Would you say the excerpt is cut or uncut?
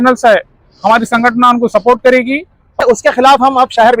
cut